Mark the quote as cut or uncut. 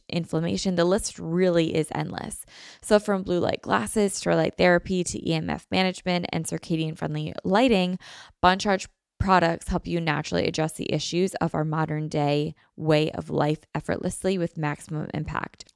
uncut